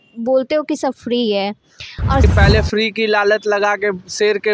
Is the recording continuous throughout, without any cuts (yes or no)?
no